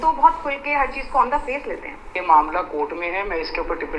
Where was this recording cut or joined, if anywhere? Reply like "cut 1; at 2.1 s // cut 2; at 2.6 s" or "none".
cut 1; at 2.1 s